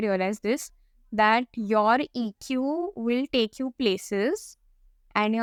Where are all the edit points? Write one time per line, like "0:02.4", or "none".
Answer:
none